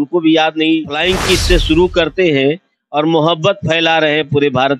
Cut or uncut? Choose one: cut